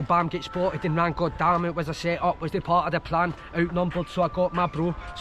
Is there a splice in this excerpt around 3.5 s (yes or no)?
no